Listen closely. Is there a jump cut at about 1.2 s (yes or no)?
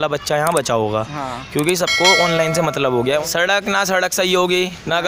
no